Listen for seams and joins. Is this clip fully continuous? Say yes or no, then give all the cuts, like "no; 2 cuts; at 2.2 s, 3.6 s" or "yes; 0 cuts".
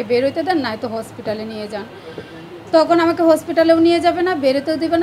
yes; 0 cuts